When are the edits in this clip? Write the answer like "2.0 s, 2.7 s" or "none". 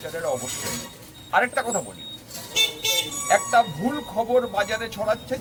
none